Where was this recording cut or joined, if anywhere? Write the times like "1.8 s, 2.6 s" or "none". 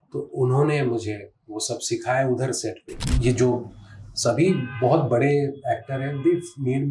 3.1 s